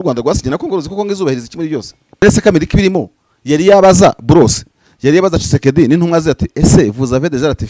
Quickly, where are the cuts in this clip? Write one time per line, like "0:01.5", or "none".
0:02.2